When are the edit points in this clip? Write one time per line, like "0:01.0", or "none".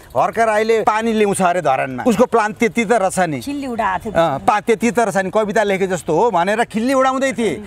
0:00.8
0:01.9